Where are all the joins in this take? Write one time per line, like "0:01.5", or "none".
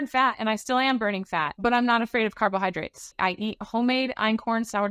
0:01.5
0:03.1